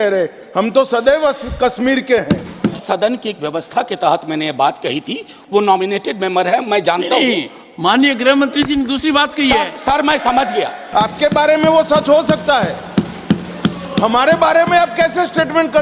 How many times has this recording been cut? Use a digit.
2